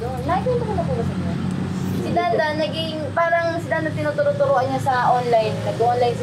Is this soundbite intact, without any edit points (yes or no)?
yes